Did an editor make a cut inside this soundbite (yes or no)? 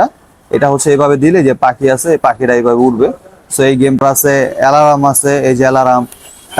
yes